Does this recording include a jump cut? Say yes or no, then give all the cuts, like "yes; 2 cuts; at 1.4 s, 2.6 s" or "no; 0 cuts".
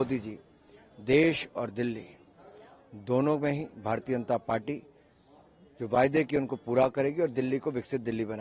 no; 0 cuts